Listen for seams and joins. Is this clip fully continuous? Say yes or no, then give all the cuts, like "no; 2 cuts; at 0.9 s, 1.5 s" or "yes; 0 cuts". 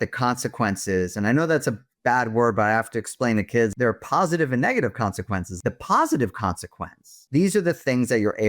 no; 3 cuts; at 3.7 s, 5.5 s, 7.2 s